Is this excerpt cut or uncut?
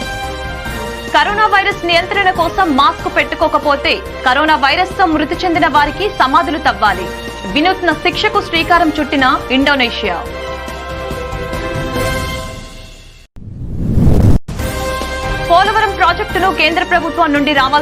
cut